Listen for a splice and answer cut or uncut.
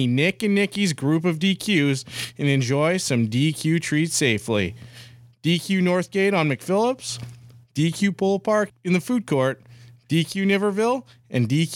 cut